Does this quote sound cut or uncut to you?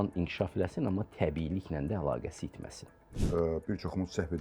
cut